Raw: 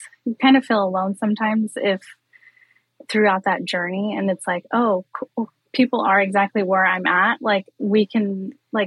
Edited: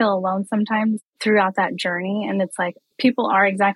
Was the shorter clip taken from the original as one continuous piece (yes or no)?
no